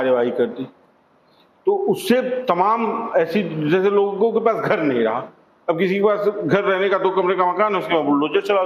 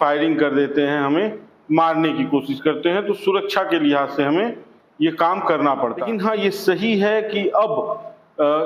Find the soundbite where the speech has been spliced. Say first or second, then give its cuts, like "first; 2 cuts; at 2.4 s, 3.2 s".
second; 1 cut; at 6.0 s